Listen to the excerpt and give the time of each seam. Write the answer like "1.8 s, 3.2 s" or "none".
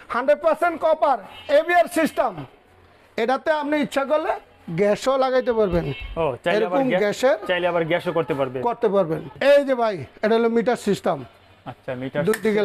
9.3 s